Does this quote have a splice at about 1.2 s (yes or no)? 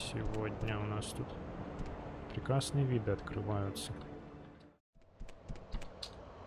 no